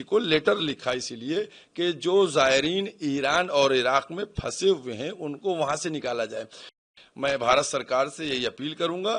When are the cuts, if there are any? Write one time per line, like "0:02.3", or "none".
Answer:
0:06.9